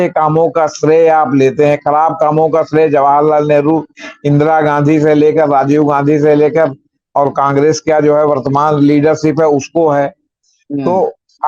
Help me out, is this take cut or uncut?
uncut